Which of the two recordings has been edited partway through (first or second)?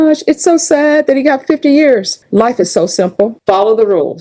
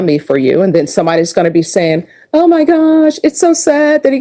first